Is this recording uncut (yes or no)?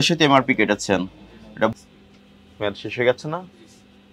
no